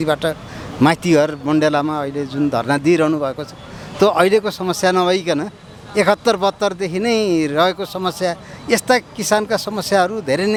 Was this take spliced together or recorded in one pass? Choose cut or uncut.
uncut